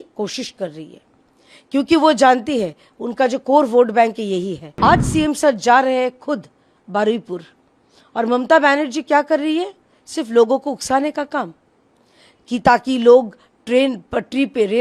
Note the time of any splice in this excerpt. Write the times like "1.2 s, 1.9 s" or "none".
4.6 s